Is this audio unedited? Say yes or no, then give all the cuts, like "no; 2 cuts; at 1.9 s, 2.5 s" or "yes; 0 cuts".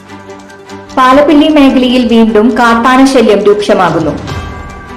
no; 1 cut; at 0.9 s